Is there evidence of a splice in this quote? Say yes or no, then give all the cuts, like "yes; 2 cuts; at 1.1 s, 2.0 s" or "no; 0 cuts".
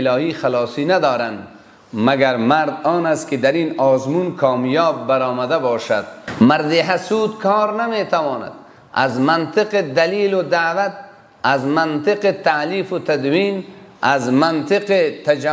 yes; 1 cut; at 6.2 s